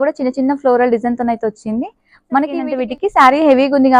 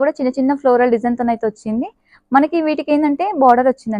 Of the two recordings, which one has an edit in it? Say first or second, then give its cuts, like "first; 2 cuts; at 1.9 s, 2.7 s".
first; 1 cut; at 2.7 s